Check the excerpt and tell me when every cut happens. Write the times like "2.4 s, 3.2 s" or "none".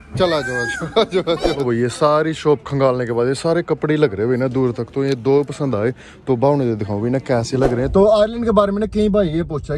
1.6 s, 7.9 s